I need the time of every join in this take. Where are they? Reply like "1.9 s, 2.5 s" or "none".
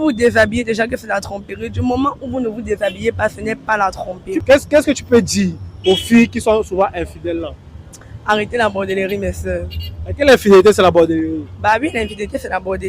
4.4 s